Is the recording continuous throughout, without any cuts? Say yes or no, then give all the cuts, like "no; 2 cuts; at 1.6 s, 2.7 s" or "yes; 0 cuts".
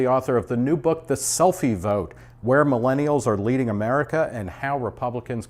no; 1 cut; at 1.0 s